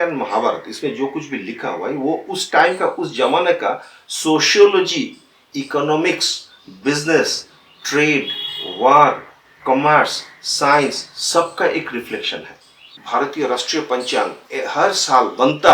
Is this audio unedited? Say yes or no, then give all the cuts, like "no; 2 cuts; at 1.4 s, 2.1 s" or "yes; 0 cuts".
no; 1 cut; at 12.9 s